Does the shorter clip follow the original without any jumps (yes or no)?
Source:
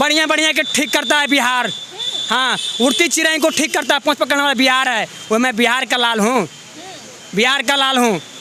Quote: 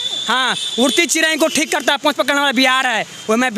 yes